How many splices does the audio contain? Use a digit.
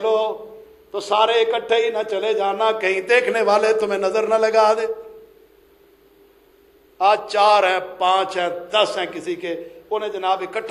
0